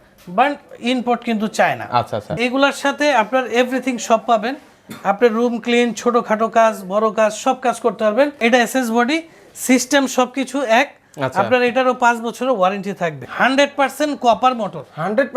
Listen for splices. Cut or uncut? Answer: cut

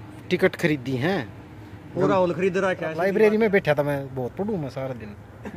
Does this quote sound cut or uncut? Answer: cut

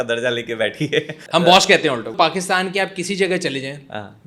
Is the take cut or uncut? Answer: cut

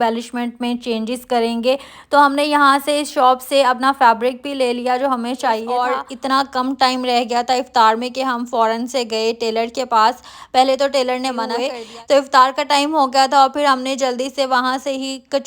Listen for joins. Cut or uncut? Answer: cut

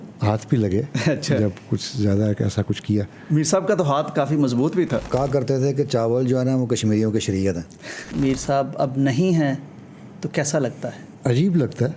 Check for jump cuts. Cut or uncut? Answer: cut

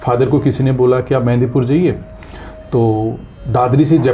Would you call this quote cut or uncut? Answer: uncut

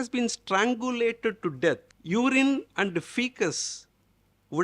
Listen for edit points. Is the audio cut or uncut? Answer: cut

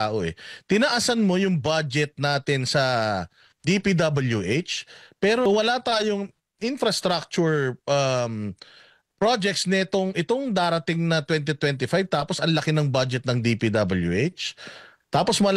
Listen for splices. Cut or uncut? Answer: cut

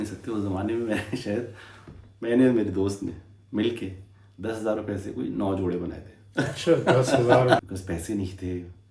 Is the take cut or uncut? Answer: cut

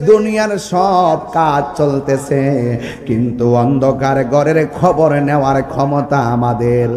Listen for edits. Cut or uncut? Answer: uncut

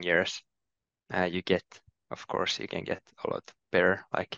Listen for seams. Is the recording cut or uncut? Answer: uncut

